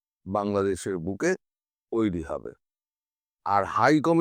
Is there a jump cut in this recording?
no; 0 cuts

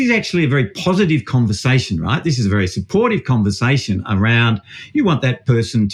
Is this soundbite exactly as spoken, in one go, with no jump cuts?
yes; 0 cuts

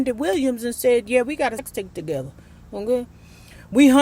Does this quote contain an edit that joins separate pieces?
yes; 1 cut; at 1.6 s

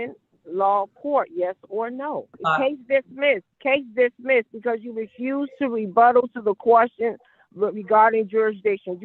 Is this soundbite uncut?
no; 2 cuts; at 2.3 s, 3.5 s

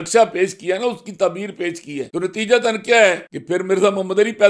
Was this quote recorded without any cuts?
no; 2 cuts; at 2.1 s, 3.3 s

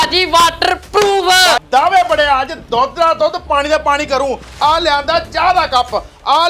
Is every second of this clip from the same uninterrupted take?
yes; 0 cuts

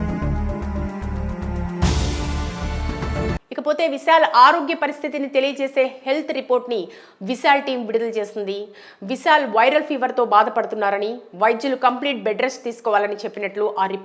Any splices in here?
no; 0 cuts

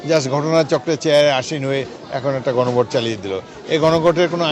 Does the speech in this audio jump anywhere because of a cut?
no; 0 cuts

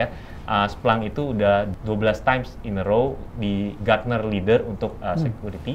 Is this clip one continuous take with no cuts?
no; 1 cut; at 1.7 s

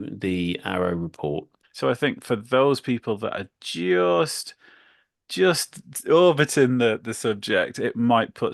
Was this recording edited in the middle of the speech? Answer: yes; 1 cut; at 1.5 s

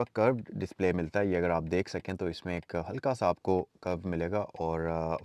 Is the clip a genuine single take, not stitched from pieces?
yes; 0 cuts

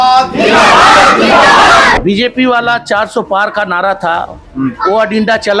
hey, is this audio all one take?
no; 1 cut; at 1.9 s

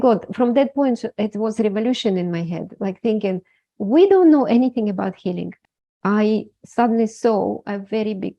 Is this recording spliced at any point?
yes; 1 cut; at 5.5 s

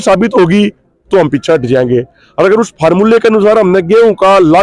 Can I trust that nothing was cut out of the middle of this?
yes; 0 cuts

